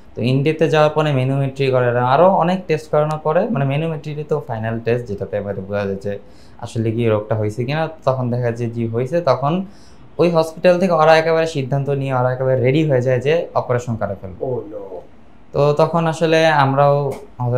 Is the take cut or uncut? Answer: uncut